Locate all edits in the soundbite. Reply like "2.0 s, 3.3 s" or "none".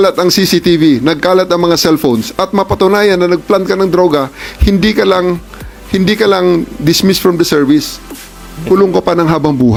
none